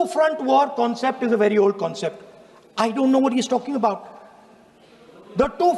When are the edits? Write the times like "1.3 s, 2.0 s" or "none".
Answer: none